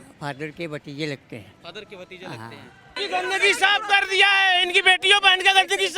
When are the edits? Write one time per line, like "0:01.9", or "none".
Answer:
0:03.0